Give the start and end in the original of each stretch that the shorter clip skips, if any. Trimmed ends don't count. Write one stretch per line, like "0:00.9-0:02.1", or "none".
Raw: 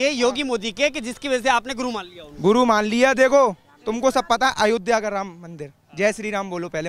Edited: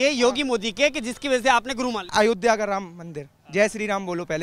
0:02.1-0:04.5

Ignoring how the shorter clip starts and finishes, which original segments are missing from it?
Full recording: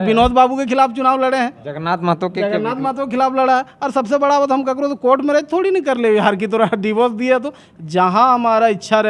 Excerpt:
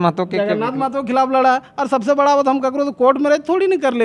none

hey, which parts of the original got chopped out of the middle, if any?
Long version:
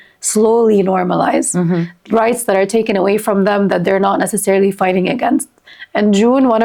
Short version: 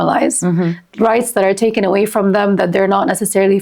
none

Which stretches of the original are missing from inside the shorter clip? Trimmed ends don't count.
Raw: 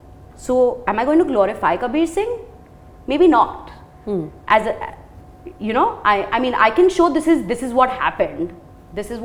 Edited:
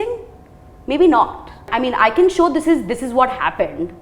0:03.9-0:06.3

